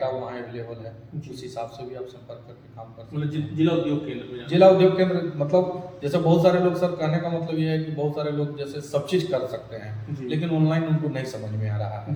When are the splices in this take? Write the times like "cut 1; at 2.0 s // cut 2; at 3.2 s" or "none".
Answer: none